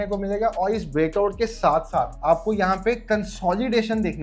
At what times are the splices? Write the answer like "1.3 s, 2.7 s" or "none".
none